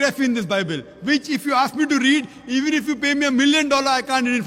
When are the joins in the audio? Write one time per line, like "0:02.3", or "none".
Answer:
none

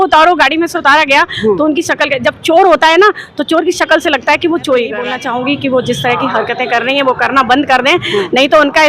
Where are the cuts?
0:05.1

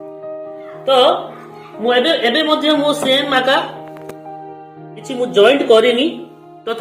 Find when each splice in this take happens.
none

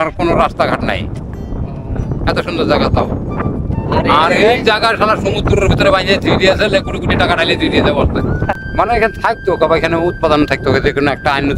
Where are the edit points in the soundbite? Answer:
none

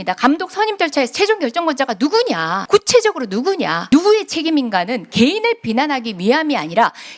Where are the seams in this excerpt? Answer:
0:02.6
0:03.8

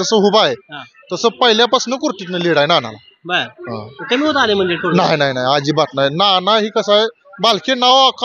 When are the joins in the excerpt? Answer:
none

